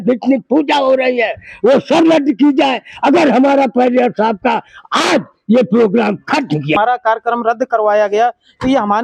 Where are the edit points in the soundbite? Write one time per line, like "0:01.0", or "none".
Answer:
0:06.7